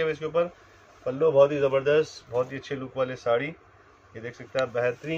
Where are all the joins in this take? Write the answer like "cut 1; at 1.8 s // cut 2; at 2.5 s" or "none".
none